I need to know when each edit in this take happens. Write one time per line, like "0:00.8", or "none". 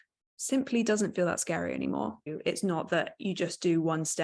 0:02.3